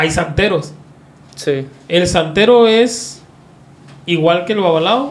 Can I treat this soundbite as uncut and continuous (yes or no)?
yes